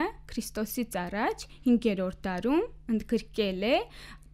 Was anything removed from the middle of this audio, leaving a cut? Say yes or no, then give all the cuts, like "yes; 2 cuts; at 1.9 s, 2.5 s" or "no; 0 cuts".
no; 0 cuts